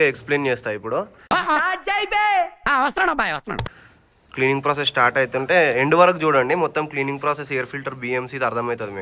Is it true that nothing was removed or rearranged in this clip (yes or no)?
yes